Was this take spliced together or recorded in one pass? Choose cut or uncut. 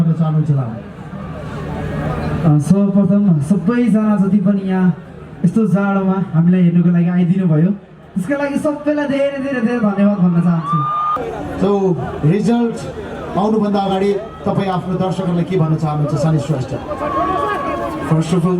cut